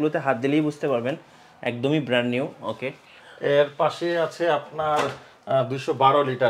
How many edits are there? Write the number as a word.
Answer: zero